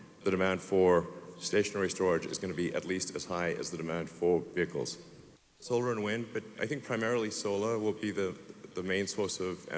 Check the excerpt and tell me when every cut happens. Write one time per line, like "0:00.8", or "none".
0:05.3